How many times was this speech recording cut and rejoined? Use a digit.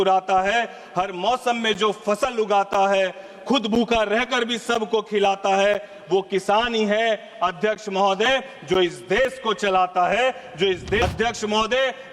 1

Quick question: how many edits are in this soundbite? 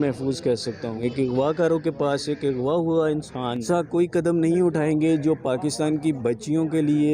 2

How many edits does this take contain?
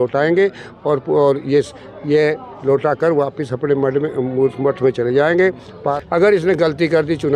1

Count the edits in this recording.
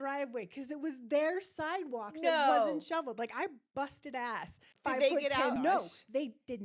2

